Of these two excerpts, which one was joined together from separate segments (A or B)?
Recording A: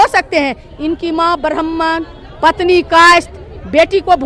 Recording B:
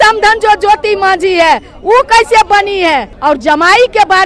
B